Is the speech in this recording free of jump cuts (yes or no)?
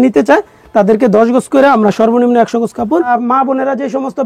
no